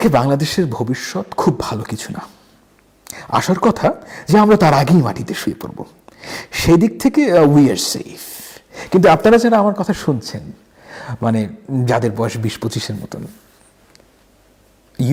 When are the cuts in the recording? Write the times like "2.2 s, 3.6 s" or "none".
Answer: none